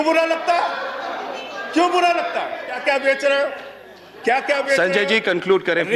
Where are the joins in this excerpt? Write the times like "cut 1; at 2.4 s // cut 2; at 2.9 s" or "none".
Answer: cut 1; at 2.8 s